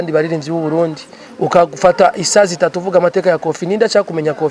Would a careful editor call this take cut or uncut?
uncut